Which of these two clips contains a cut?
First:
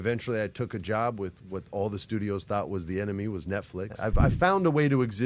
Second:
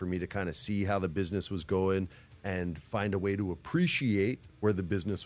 first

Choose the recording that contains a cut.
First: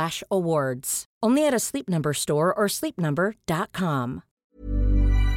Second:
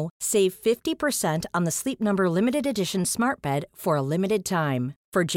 first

